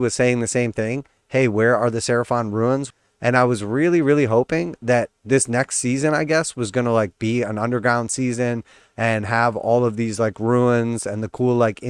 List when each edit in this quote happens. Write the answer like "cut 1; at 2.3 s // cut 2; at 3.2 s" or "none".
cut 1; at 2.9 s // cut 2; at 5.2 s